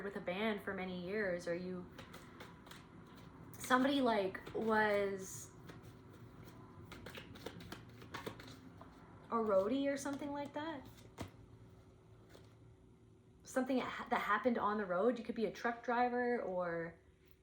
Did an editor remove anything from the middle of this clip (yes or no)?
no